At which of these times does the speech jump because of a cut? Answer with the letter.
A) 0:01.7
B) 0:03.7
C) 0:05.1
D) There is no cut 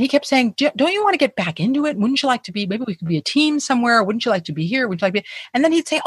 D